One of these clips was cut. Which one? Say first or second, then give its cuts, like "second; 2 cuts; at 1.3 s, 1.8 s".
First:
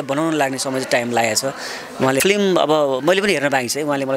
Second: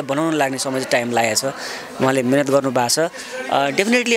first; 1 cut; at 2.2 s